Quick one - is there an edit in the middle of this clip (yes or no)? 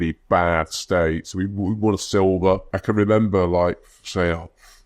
yes